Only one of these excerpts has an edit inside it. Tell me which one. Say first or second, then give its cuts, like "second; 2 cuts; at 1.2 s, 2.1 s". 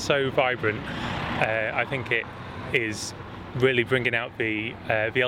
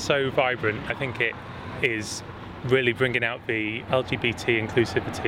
second; 2 cuts; at 0.9 s, 3.8 s